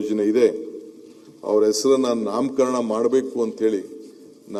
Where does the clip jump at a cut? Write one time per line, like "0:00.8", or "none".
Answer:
none